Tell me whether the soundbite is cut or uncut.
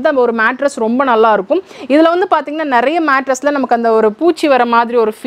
uncut